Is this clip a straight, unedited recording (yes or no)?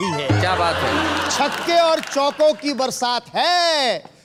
yes